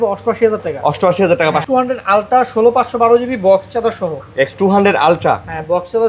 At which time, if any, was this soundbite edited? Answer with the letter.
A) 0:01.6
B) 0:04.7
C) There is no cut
A